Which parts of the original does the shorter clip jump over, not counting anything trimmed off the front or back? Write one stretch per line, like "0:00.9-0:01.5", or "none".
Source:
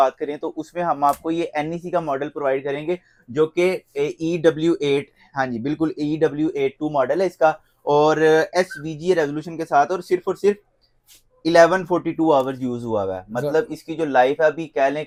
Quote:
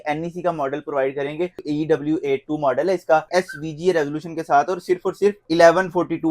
0:03.1-0:06.0
0:07.6-0:08.5
0:10.6-0:11.4